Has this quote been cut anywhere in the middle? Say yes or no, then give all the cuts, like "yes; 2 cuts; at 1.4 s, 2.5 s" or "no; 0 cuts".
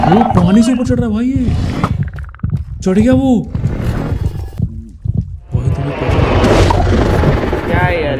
yes; 1 cut; at 4.5 s